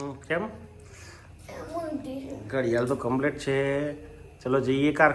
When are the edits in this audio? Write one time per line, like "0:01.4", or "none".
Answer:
none